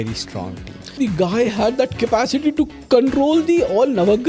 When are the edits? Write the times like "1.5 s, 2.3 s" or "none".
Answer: 1.0 s